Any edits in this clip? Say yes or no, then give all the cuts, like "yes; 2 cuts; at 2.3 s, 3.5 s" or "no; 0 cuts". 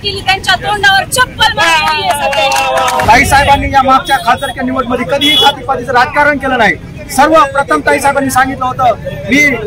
yes; 1 cut; at 3.0 s